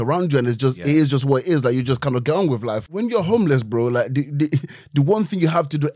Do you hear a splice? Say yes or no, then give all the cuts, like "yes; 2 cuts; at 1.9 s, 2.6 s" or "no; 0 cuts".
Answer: yes; 1 cut; at 2.8 s